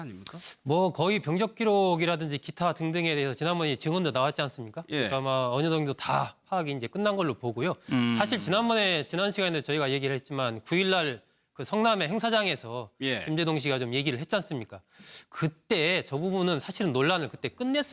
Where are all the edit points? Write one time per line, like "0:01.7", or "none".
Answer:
none

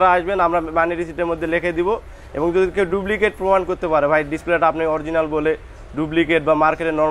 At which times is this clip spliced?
none

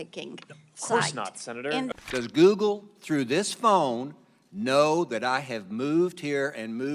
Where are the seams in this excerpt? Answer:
0:01.9

